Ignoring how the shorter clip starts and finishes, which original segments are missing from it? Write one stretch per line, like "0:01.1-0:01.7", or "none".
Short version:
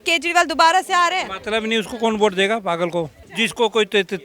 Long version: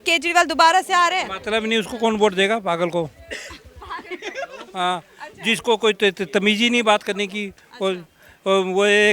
0:03.2-0:05.3